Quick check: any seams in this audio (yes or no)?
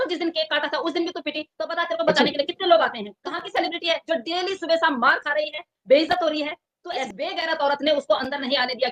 yes